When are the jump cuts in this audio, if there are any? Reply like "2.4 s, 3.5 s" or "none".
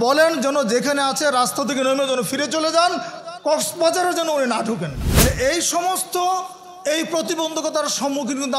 5.0 s